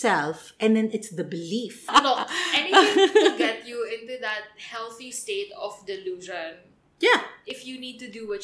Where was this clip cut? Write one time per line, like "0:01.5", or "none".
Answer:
0:01.9